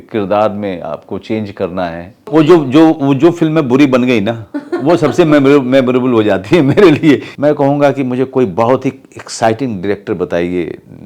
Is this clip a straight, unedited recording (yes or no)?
no